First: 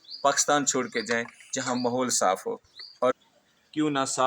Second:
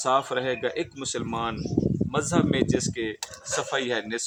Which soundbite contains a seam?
first; 1 cut; at 3.2 s

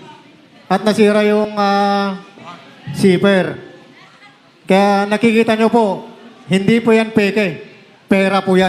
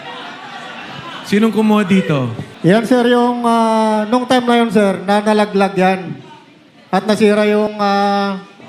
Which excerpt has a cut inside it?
second; 1 cut; at 2.4 s

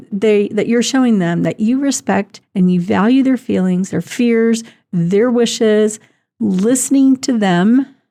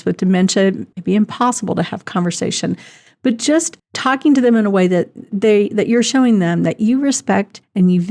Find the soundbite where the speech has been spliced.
second; 1 cut; at 0.9 s

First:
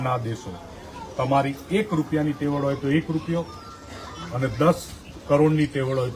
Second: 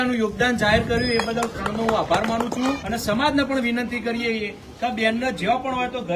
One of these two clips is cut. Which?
second; 1 cut; at 2.8 s

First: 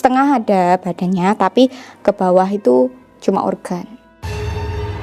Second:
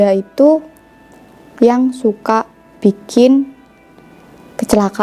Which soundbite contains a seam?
first; 1 cut; at 4.1 s

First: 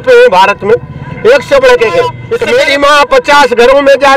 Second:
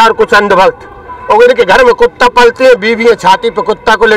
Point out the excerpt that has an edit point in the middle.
first; 1 cut; at 2.3 s

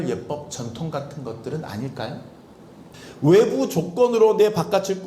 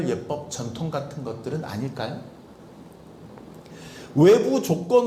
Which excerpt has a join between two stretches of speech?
first; 1 cut; at 2.9 s

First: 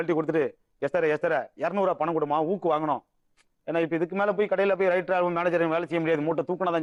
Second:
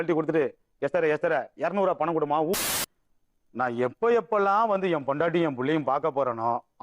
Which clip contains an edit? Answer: second; 1 cut; at 2.6 s

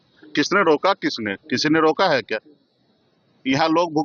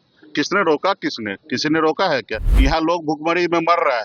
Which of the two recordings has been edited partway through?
second; 1 cut; at 2.4 s

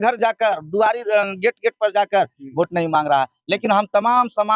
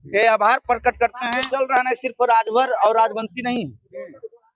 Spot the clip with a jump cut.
second; 1 cut; at 1.4 s

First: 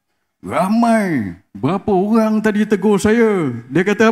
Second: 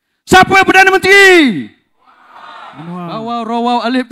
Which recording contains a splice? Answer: second; 1 cut; at 3.2 s

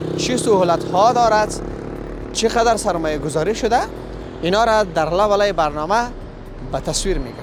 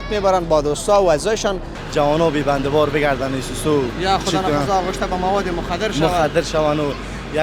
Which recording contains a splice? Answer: second; 1 cut; at 1.7 s

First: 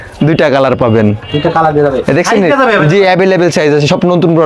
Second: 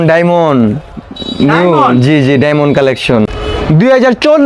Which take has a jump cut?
second; 1 cut; at 3.4 s

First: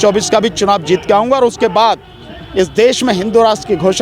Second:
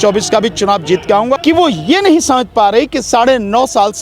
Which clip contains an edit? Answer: second; 1 cut; at 1.4 s

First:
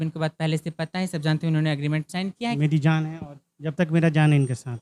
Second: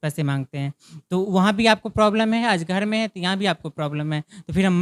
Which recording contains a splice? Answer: first; 1 cut; at 2.6 s

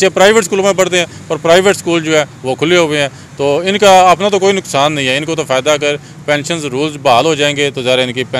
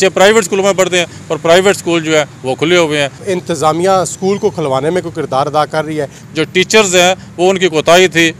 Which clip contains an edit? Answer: second; 2 cuts; at 3.2 s, 6.2 s

